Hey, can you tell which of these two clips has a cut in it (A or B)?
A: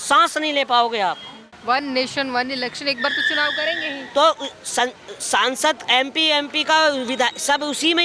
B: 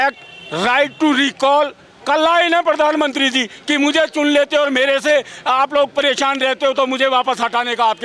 A